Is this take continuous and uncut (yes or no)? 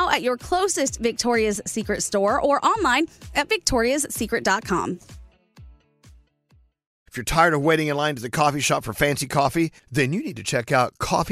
no